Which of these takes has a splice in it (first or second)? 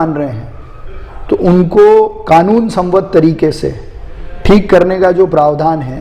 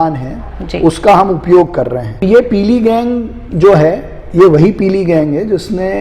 second